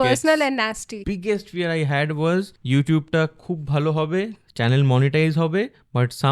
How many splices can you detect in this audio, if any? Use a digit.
2